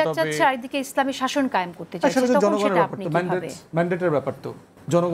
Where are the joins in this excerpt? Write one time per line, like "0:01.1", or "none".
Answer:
none